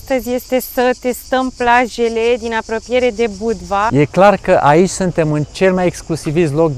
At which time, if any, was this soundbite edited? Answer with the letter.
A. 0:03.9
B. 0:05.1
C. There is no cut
A